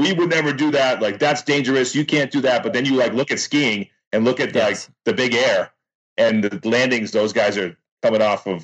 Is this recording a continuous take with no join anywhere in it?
yes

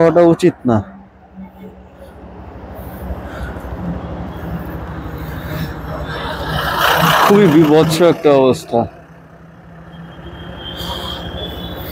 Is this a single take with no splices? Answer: yes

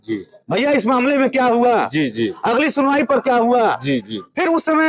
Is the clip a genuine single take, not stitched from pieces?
yes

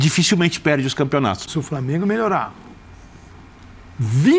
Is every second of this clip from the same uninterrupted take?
no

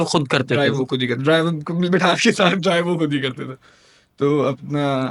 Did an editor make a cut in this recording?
no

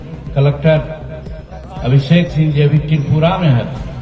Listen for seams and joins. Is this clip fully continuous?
yes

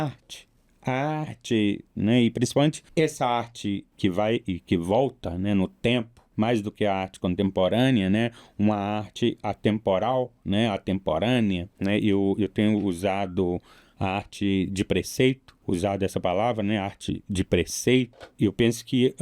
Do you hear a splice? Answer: yes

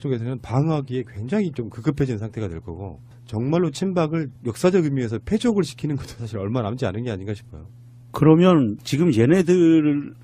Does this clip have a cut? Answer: yes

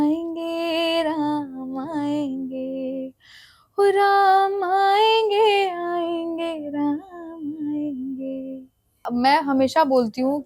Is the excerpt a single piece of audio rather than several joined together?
no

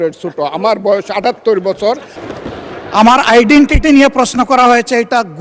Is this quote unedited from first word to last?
no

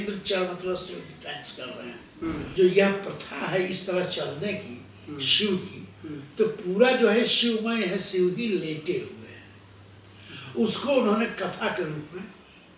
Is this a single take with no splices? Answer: no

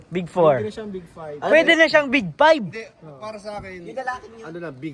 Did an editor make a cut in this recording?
no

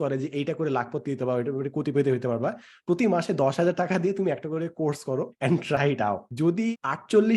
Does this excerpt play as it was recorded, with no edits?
no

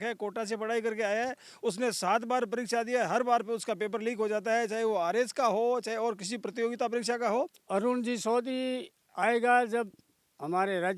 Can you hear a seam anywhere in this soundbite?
yes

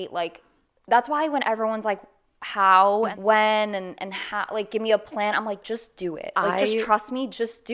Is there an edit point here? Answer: yes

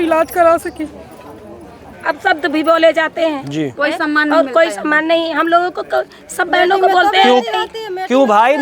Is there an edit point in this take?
yes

